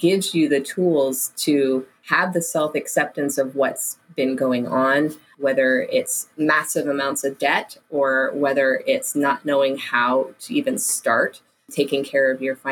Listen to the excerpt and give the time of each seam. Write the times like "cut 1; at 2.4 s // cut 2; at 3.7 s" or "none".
cut 1; at 2.0 s // cut 2; at 5.3 s // cut 3; at 11.7 s